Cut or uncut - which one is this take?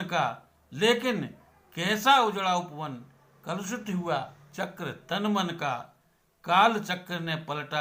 uncut